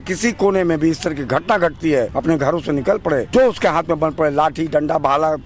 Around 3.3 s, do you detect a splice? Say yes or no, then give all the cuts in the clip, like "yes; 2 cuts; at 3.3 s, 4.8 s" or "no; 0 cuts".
yes; 2 cuts; at 2.1 s, 3.3 s